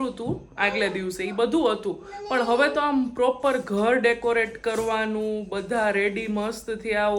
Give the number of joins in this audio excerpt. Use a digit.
0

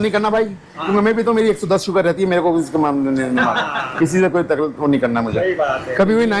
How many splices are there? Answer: 0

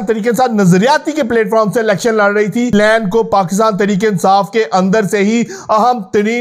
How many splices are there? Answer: 1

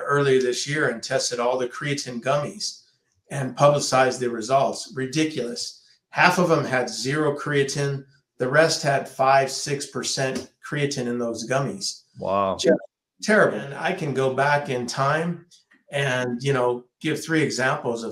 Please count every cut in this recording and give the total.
1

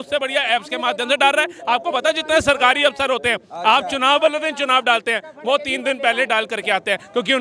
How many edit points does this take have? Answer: 0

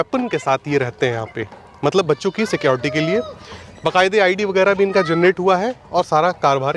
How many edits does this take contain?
0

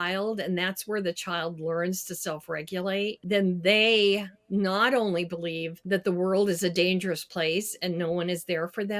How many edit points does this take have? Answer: 2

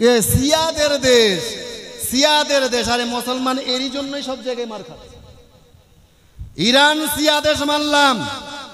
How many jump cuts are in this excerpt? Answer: 0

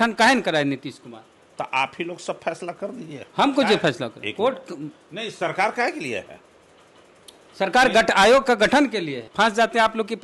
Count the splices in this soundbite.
1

